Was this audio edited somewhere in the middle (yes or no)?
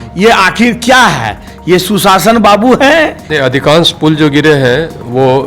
yes